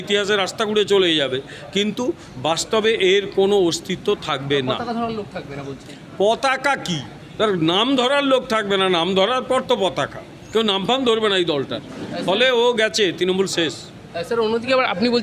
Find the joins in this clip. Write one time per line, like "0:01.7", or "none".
none